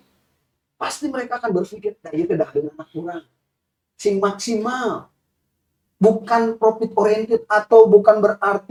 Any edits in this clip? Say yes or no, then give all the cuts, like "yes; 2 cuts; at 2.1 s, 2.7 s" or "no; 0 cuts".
no; 0 cuts